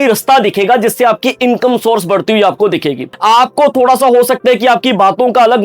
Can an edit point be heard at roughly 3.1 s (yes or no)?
yes